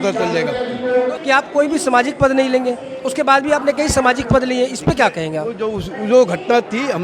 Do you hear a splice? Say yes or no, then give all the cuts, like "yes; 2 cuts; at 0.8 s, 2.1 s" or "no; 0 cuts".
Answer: yes; 1 cut; at 1.2 s